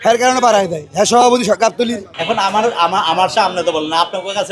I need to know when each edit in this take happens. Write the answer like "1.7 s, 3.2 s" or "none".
2.1 s

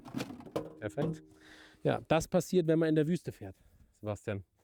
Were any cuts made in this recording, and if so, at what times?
none

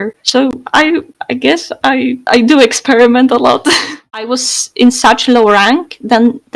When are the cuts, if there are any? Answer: 4.0 s

